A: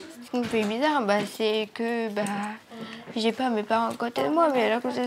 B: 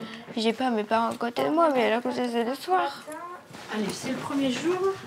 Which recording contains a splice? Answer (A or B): B